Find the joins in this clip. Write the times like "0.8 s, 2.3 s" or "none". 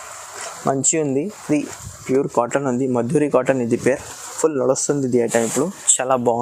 1.8 s